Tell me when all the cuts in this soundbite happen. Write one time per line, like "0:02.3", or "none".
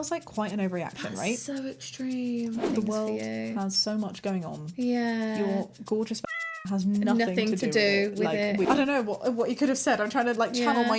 0:02.7
0:08.4